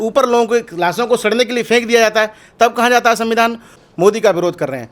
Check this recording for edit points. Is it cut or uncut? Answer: cut